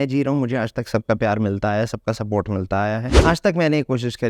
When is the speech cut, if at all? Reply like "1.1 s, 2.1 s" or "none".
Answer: 3.1 s